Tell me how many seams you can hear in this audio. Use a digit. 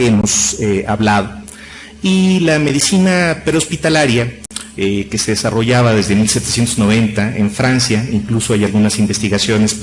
1